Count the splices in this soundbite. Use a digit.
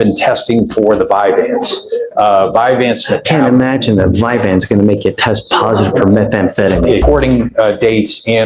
1